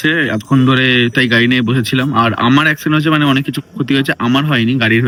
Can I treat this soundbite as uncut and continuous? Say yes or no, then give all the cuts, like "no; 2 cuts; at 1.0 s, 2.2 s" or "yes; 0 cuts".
yes; 0 cuts